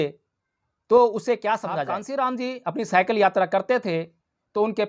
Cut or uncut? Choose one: cut